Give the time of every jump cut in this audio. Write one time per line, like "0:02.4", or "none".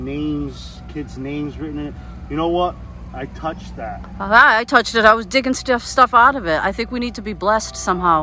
none